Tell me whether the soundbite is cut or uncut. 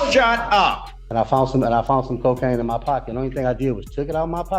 cut